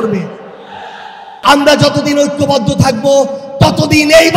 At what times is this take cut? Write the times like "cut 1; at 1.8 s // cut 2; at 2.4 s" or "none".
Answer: cut 1; at 1.3 s